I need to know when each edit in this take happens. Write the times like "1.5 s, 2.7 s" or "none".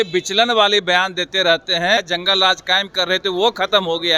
2.0 s